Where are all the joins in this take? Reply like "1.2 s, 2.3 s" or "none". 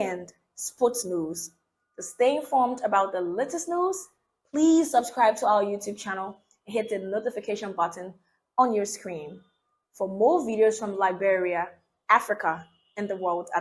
none